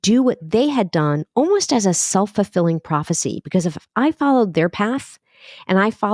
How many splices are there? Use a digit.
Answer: 0